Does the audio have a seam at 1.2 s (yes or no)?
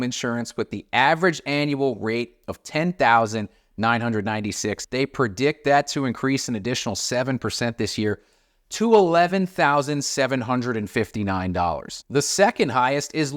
no